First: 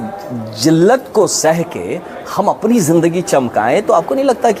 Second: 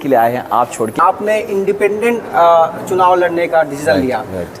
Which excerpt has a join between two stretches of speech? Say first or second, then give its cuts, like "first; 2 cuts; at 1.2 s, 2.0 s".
second; 1 cut; at 1.0 s